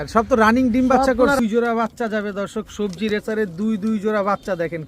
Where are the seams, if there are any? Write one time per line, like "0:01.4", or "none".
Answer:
0:01.4